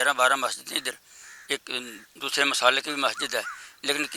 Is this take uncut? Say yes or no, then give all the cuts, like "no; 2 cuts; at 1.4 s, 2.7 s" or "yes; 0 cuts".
yes; 0 cuts